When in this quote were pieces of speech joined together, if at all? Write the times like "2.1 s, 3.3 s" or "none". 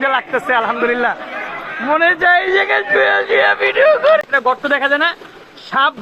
4.2 s